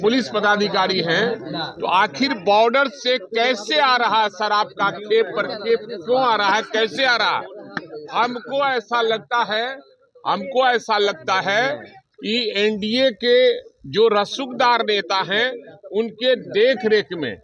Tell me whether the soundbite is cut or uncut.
uncut